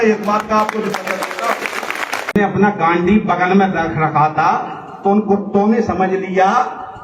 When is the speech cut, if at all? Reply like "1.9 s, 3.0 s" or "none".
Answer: 2.4 s